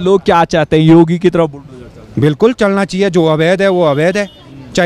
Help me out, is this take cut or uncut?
uncut